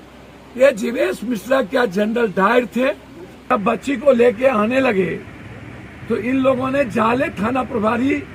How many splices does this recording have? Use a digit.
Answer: 1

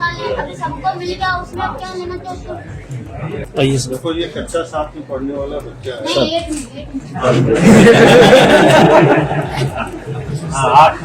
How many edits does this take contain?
1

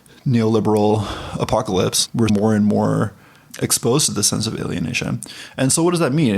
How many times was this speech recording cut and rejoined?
1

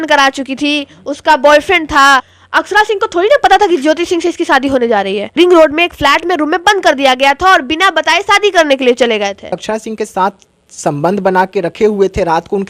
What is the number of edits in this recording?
3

